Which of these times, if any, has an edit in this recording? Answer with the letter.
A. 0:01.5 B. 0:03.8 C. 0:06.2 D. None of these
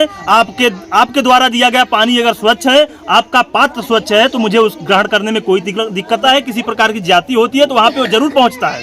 C